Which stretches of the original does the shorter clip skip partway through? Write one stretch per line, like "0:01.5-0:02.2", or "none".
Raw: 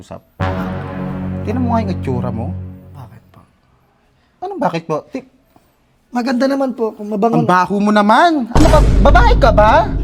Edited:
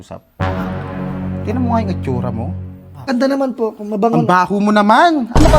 0:03.1-0:06.3